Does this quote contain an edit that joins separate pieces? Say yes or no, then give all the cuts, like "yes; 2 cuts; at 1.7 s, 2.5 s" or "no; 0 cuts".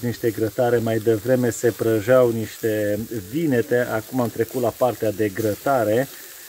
no; 0 cuts